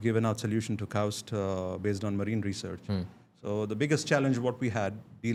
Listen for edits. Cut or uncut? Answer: uncut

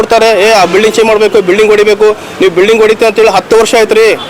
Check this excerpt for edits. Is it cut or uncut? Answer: uncut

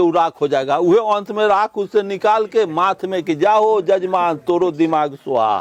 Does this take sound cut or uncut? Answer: uncut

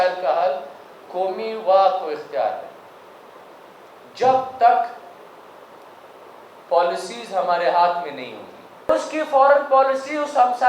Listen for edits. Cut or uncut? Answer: cut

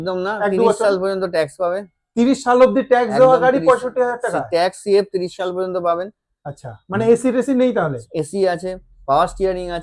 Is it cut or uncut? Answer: uncut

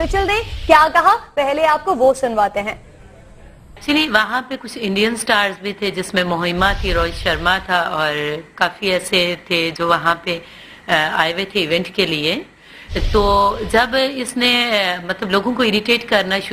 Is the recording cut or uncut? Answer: cut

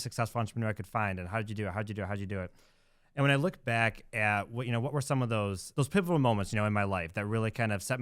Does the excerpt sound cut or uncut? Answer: cut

